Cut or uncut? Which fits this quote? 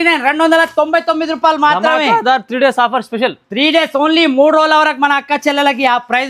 uncut